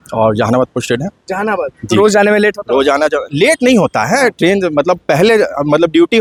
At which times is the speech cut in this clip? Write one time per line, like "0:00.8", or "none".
none